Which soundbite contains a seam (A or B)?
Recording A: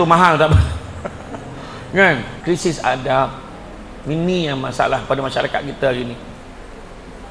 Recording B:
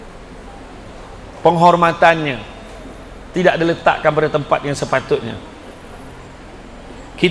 A